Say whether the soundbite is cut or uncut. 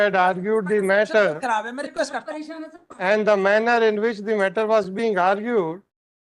uncut